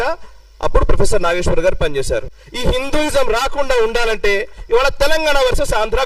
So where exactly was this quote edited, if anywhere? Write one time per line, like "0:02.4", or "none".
0:02.1